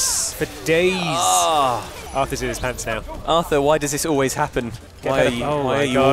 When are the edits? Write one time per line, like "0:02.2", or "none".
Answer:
0:02.0
0:03.1
0:04.8